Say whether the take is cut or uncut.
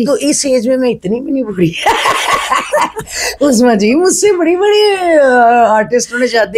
uncut